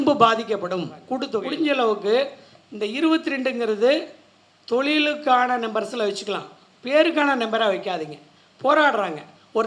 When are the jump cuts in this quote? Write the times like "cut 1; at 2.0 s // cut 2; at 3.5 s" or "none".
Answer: cut 1; at 1.4 s